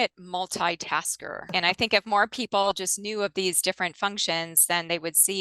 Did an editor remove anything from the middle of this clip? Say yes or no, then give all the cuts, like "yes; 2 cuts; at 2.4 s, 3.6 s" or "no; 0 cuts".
yes; 1 cut; at 1.4 s